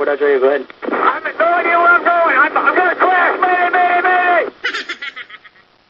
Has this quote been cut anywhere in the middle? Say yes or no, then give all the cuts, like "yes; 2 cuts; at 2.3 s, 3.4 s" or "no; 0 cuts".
no; 0 cuts